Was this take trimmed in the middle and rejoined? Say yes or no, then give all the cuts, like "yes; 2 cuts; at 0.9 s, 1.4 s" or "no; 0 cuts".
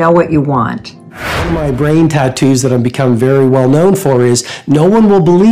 yes; 1 cut; at 1.4 s